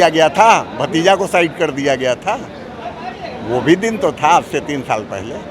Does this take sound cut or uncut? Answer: uncut